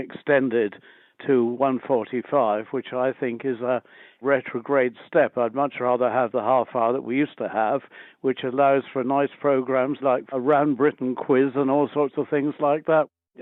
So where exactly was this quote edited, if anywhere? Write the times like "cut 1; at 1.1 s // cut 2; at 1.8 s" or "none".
cut 1; at 6.3 s

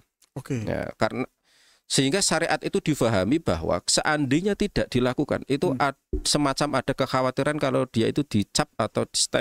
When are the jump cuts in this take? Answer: none

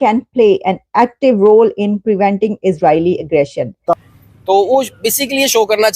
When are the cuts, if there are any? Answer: cut 1; at 4.0 s

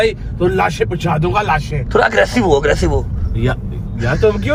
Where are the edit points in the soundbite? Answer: none

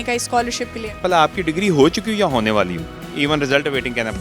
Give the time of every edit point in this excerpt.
cut 1; at 1.0 s

